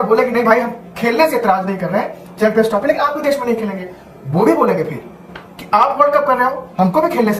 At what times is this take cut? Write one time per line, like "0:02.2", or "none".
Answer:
none